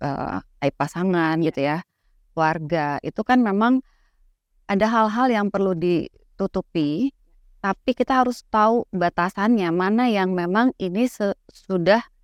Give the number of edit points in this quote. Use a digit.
0